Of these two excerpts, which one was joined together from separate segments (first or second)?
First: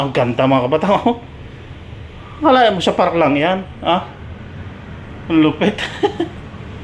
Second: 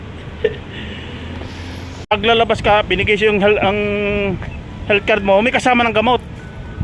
second